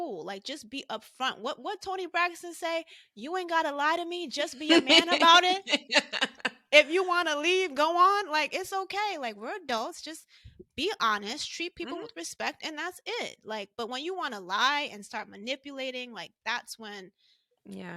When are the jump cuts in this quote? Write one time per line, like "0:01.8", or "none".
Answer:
none